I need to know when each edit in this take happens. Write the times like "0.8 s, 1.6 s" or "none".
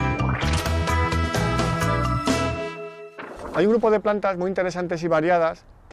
2.4 s